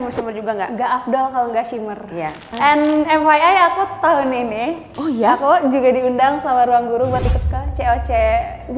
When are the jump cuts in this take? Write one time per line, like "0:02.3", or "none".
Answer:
0:02.4

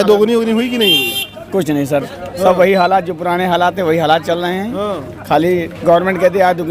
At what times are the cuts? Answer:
none

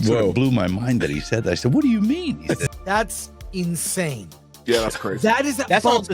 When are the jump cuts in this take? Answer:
0:02.6

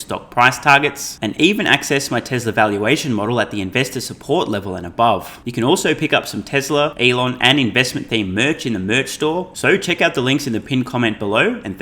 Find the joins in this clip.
0:05.4
0:06.9
0:09.5

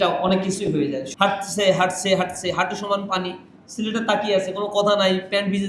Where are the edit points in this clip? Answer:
0:01.1

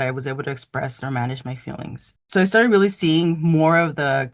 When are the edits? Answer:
0:01.0
0:02.2

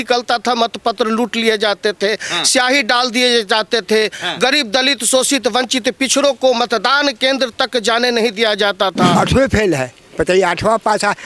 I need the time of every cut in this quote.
0:09.1

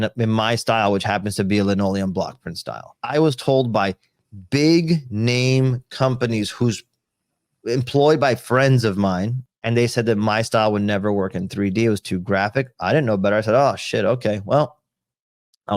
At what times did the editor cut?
0:09.4

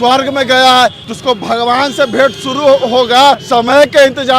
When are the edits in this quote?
0:01.0
0:03.4

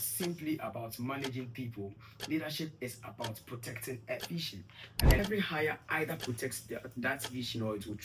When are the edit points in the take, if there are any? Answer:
0:05.2

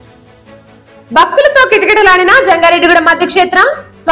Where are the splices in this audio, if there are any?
0:01.0

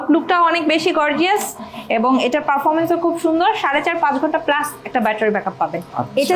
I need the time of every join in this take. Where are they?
none

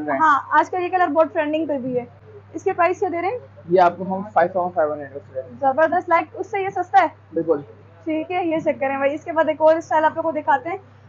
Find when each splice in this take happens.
none

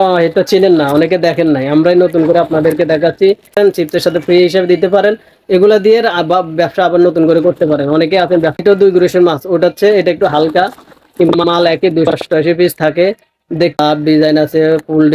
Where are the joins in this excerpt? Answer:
0:03.6
0:08.6
0:13.8

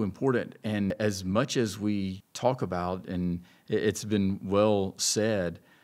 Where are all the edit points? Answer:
0:00.9
0:02.2

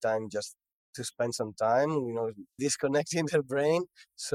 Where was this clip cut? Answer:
none

